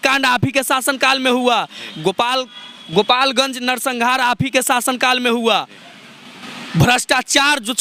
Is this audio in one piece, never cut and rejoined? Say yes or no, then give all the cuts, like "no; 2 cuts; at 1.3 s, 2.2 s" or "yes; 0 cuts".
yes; 0 cuts